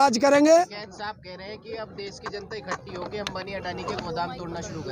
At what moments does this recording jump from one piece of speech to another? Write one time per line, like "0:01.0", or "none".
none

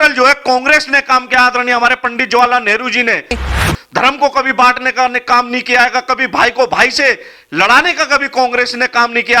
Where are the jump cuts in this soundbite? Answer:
0:03.7

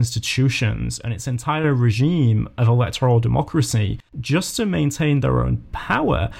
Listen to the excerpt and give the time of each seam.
none

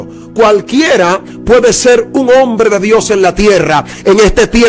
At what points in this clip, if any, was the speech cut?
none

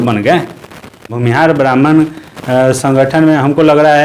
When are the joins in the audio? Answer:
0:01.1

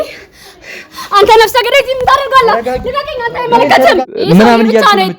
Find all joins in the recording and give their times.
0:04.1

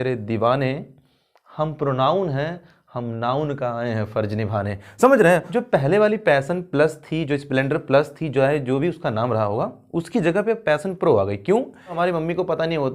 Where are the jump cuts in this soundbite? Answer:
0:05.5
0:12.0

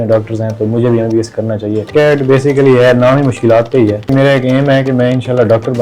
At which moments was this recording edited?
0:01.9
0:04.1

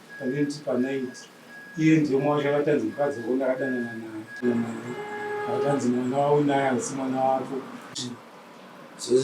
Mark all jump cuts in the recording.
0:04.4
0:08.0

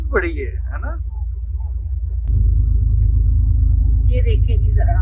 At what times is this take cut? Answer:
0:02.2

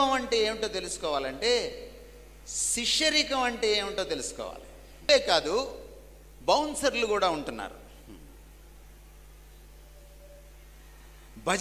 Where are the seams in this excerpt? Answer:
0:05.1

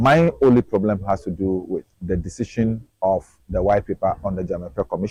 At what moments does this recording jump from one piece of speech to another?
none

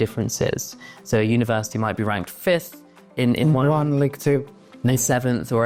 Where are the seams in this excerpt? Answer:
none

